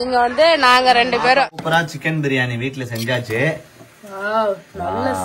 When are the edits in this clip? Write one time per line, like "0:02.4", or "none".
0:01.4